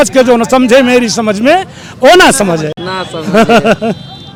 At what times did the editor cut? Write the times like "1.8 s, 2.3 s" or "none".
none